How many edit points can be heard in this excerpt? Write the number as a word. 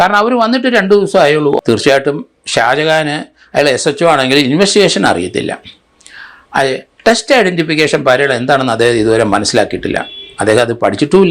one